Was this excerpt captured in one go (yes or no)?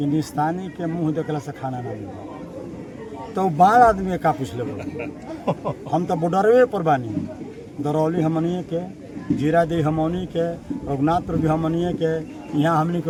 yes